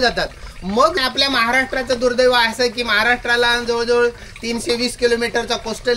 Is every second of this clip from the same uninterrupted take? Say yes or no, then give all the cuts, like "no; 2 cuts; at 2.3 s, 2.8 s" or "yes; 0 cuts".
no; 1 cut; at 1.0 s